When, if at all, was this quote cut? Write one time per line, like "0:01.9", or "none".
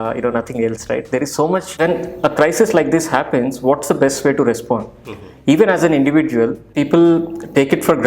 0:01.7
0:06.6